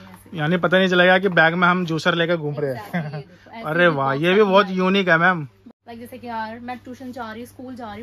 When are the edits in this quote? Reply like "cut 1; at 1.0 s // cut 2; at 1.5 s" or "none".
cut 1; at 5.6 s